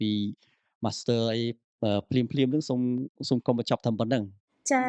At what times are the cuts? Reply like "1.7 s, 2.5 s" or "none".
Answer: none